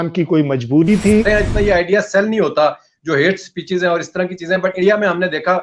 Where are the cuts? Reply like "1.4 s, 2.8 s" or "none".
1.2 s

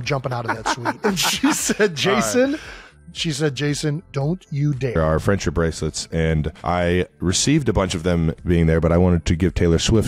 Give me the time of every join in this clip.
none

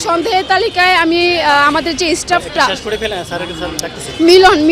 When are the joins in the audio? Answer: none

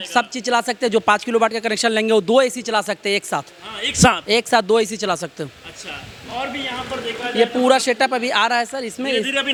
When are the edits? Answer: none

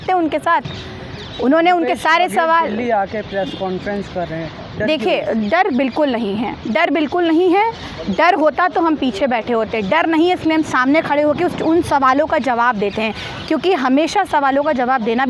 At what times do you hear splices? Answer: none

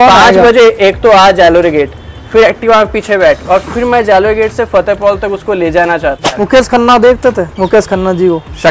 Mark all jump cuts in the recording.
6.4 s

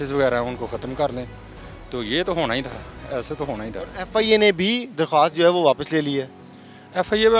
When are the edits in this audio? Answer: none

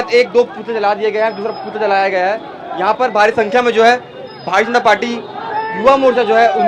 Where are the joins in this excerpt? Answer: none

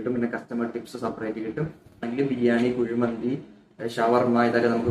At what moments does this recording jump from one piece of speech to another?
2.1 s

